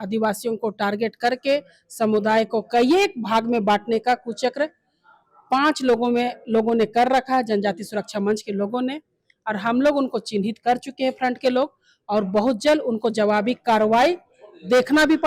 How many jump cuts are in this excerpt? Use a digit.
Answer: 0